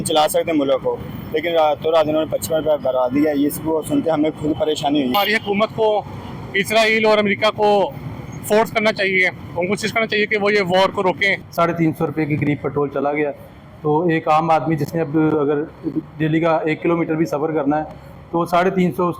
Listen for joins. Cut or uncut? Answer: cut